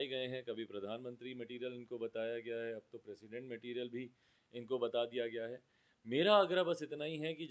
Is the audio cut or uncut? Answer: uncut